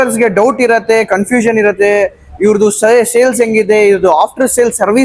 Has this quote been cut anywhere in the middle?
no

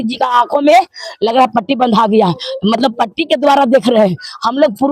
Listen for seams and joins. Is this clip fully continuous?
yes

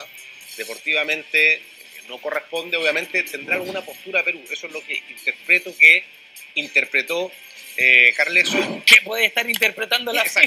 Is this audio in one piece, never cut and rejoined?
yes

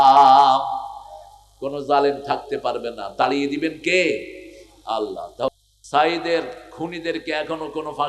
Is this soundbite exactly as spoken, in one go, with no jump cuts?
no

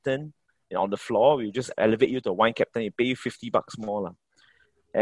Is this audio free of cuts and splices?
yes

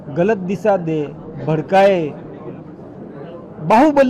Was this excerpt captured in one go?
yes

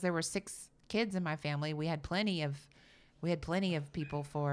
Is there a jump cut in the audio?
no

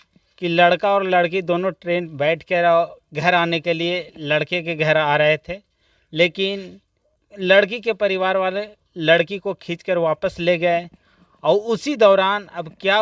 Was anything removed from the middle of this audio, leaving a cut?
no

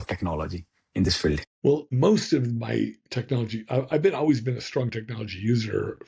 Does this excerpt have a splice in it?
yes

